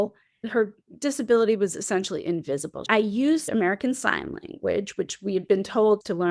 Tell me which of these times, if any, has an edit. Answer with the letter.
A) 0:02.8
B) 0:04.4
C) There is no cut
A